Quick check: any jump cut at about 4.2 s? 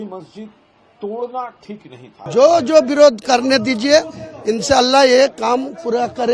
no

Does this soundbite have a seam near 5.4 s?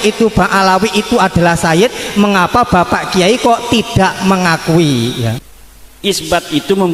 yes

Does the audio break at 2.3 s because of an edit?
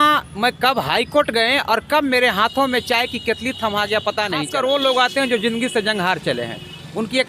no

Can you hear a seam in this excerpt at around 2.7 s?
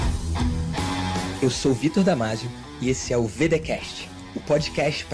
no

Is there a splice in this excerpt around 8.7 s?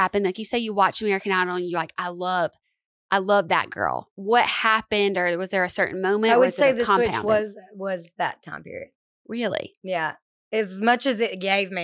no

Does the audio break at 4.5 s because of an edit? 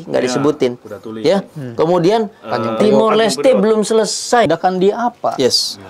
yes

